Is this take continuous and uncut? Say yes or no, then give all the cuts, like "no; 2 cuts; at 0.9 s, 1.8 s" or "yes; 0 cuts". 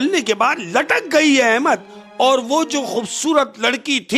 yes; 0 cuts